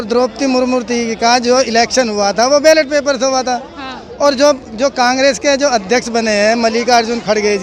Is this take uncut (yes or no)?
yes